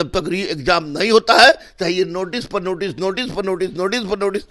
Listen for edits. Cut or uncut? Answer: uncut